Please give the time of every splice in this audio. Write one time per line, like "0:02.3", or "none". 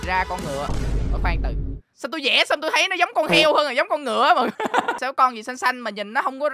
0:05.0